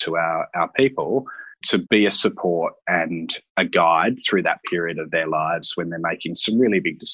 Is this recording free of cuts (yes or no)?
no